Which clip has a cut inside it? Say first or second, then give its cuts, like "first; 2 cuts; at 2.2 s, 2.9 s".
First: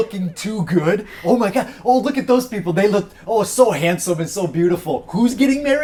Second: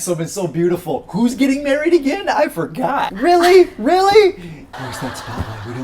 second; 2 cuts; at 3.1 s, 4.6 s